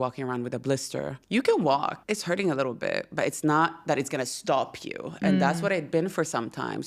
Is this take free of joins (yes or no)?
no